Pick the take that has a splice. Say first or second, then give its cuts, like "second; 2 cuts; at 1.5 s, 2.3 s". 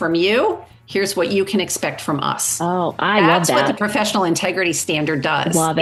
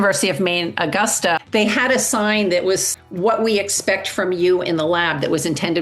second; 2 cuts; at 1.4 s, 3.0 s